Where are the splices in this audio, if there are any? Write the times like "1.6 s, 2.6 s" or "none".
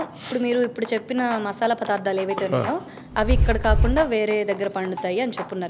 none